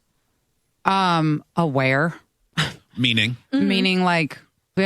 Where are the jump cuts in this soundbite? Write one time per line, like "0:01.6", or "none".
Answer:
0:01.5